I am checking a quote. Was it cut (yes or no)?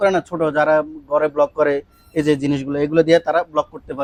no